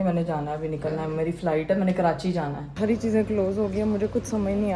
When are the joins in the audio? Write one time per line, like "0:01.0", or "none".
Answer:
0:02.7